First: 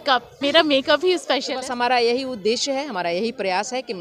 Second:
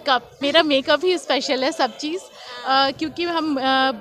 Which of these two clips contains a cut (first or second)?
first